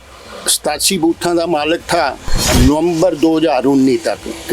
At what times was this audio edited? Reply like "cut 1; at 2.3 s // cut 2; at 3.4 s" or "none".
cut 1; at 2.5 s